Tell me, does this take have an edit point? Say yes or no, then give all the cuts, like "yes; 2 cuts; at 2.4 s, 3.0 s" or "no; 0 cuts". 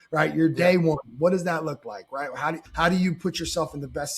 yes; 1 cut; at 2.6 s